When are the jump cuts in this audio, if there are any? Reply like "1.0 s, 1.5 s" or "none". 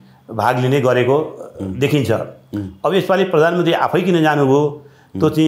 none